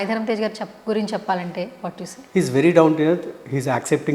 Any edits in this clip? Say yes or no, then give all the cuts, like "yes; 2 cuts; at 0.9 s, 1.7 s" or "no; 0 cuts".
yes; 1 cut; at 2.1 s